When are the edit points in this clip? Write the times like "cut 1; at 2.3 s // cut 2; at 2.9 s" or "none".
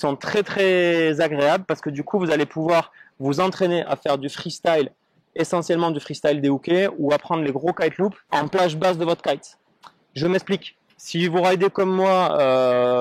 cut 1; at 8.2 s